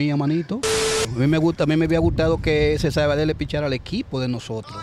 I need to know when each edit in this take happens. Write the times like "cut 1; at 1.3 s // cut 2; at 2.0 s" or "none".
cut 1; at 0.9 s